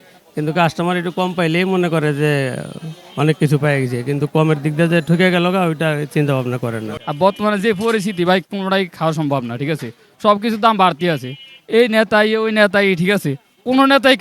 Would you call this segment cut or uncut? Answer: cut